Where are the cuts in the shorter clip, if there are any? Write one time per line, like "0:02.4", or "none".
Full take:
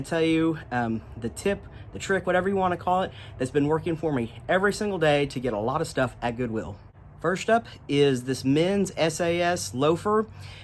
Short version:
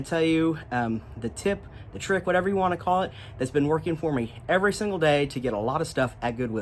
none